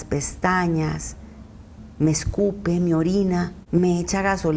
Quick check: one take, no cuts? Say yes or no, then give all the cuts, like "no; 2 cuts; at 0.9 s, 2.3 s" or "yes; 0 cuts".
no; 1 cut; at 3.6 s